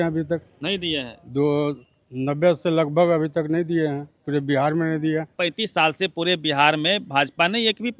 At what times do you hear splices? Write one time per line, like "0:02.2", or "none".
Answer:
0:05.3